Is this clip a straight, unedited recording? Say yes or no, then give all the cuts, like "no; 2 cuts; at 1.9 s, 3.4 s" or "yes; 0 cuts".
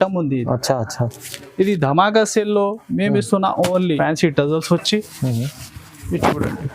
no; 1 cut; at 3.9 s